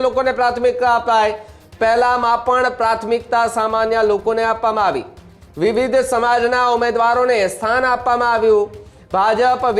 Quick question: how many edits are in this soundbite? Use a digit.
0